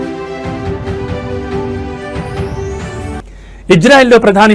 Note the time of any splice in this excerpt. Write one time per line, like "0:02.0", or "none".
0:03.2